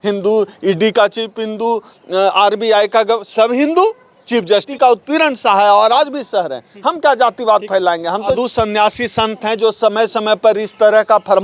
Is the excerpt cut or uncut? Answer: cut